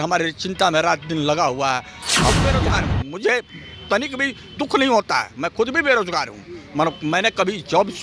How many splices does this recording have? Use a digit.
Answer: 1